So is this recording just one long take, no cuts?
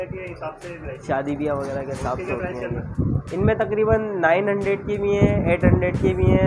yes; 0 cuts

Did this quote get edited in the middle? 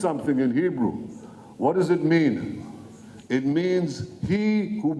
no; 0 cuts

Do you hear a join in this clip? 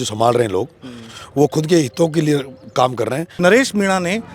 yes; 1 cut; at 3.3 s

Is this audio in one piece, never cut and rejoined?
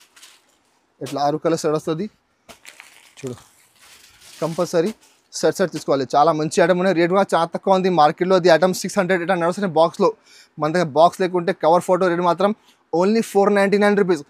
yes; 0 cuts

